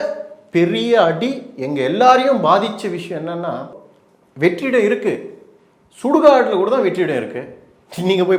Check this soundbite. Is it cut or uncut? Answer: uncut